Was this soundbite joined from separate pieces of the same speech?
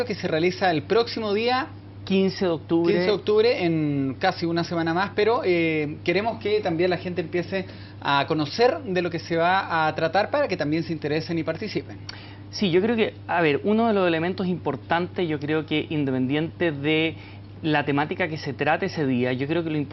no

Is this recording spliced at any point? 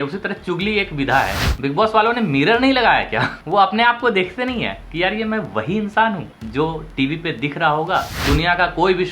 yes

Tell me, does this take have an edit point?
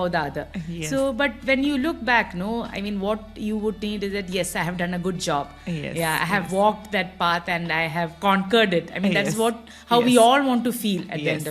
no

